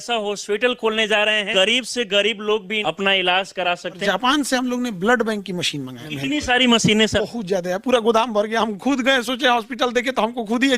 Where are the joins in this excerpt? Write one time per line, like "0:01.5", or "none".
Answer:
0:01.5
0:02.7
0:04.0
0:06.0
0:07.2